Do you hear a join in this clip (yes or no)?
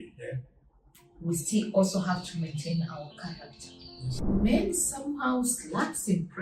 yes